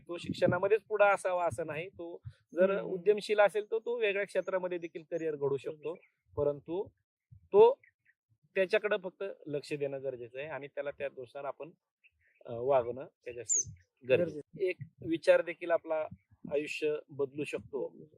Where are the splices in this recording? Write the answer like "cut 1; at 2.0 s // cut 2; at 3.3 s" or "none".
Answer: cut 1; at 14.4 s